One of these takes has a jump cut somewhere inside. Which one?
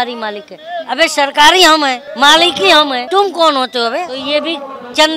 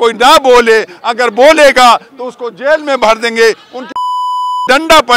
first; 3 cuts; at 2.0 s, 3.0 s, 4.2 s

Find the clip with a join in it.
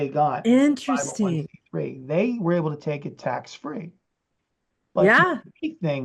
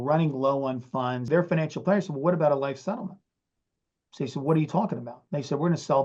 second; 1 cut; at 1.3 s

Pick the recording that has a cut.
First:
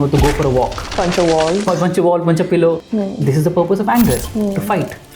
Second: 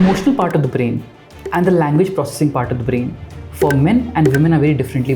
first; 2 cuts; at 1.7 s, 2.8 s

